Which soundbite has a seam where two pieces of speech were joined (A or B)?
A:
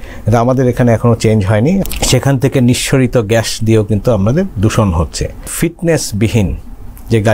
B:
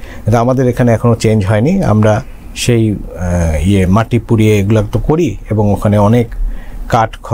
A